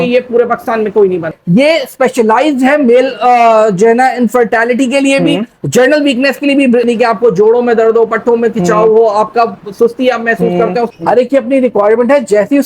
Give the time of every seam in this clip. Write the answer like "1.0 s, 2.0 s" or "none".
1.3 s, 6.9 s, 10.9 s